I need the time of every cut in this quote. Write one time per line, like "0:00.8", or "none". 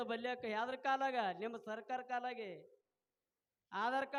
none